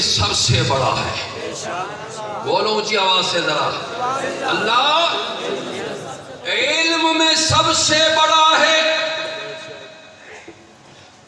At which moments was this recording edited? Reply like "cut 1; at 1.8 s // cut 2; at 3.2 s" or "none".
none